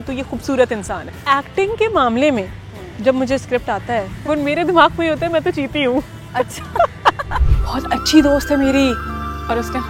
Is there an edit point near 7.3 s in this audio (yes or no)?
yes